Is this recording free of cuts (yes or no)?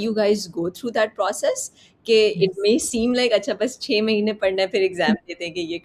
yes